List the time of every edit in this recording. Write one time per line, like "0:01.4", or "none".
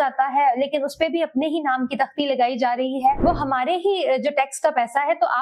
0:03.2